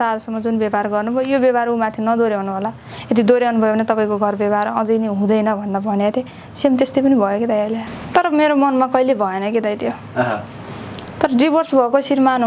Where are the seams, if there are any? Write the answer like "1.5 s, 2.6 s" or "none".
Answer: 7.9 s